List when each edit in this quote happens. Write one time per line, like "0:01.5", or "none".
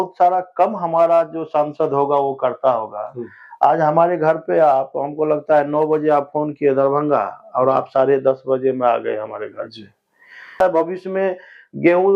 0:10.6